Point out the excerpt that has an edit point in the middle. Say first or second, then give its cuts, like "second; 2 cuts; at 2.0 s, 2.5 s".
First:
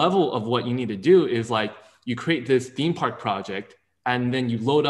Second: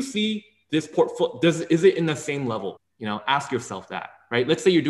second; 1 cut; at 2.9 s